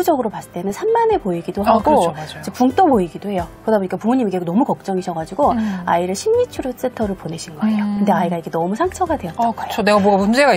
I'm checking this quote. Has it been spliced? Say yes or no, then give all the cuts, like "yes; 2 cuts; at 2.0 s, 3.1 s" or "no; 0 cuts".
no; 0 cuts